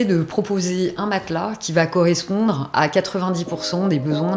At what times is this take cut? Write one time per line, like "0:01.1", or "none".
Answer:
none